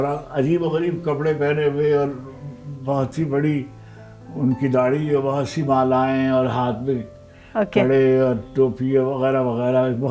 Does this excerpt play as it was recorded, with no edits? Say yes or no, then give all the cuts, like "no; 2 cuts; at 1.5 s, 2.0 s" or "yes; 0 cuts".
yes; 0 cuts